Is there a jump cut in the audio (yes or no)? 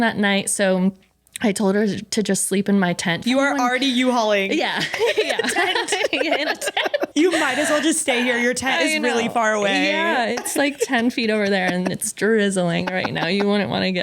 yes